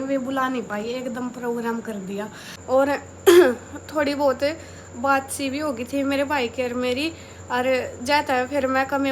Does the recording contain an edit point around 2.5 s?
yes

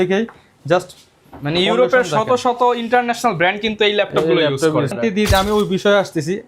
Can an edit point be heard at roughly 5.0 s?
yes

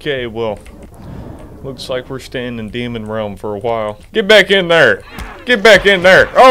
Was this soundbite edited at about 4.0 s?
yes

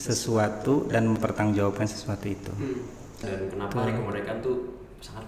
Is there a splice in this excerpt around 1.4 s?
no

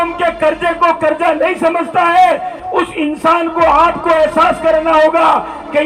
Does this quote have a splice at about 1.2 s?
no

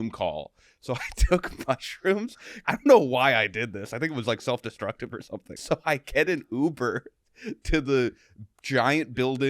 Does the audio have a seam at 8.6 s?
no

